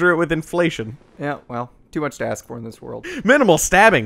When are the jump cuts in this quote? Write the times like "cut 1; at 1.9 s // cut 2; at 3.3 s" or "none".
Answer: cut 1; at 1.0 s // cut 2; at 3.0 s

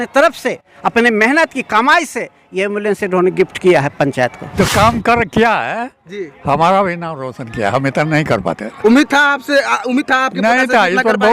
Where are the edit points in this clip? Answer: cut 1; at 4.6 s

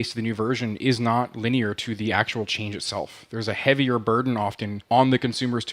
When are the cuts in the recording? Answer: cut 1; at 4.7 s

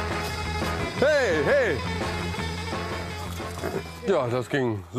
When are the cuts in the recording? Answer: none

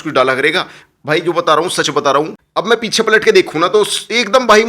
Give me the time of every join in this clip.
cut 1; at 2.4 s

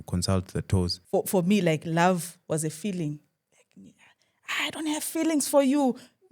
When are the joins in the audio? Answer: cut 1; at 1.0 s

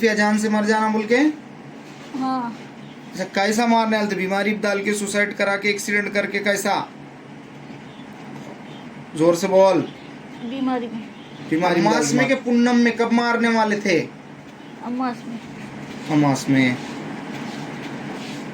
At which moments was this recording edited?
cut 1; at 11.8 s

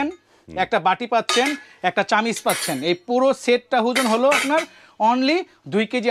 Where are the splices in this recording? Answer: none

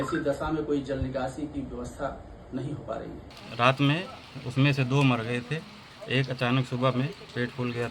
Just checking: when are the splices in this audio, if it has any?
cut 1; at 3.4 s

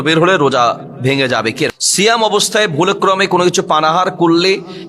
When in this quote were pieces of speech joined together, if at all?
cut 1; at 1.7 s

